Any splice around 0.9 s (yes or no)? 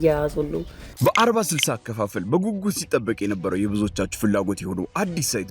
yes